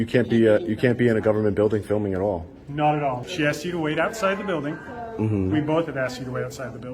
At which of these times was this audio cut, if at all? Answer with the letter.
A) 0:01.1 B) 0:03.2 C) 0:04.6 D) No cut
B